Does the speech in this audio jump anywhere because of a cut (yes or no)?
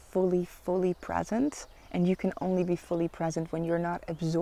no